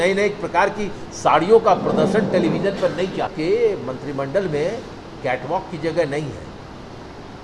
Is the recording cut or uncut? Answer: cut